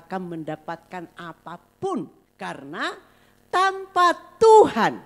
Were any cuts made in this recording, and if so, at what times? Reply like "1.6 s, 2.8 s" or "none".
2.2 s